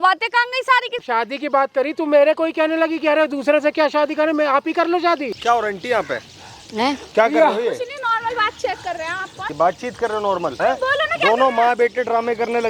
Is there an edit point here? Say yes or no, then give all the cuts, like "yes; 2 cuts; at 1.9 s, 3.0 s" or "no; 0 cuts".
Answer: yes; 4 cuts; at 1.0 s, 5.3 s, 9.4 s, 10.6 s